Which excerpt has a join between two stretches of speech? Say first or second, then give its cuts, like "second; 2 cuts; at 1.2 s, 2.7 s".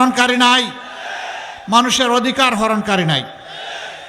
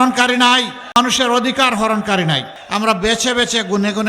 second; 2 cuts; at 1.0 s, 2.5 s